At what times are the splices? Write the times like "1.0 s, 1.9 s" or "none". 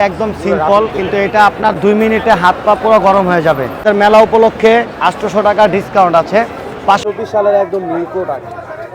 3.8 s, 7.0 s